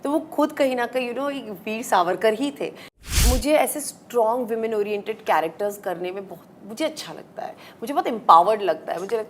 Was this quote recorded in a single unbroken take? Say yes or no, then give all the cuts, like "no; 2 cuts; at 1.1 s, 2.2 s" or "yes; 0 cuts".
no; 1 cut; at 3.0 s